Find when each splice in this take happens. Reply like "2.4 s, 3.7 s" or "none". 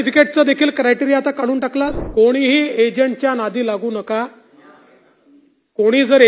2.0 s